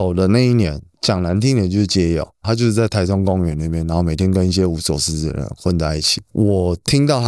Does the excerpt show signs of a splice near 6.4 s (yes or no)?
no